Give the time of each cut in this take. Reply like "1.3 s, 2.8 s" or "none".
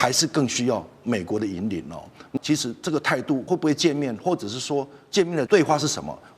2.4 s, 3.4 s, 5.5 s